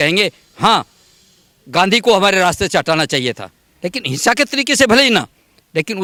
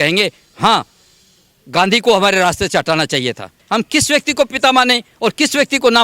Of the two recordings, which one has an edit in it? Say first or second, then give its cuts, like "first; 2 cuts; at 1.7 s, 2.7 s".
second; 1 cut; at 3.5 s